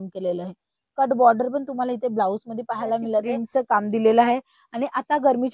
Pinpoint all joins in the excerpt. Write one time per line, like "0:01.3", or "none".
0:03.4